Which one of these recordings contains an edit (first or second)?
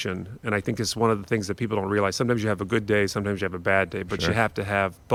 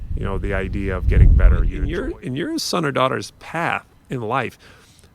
second